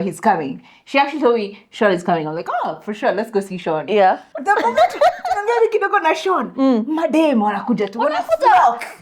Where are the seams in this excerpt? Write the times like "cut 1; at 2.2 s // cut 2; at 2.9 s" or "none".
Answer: cut 1; at 4.3 s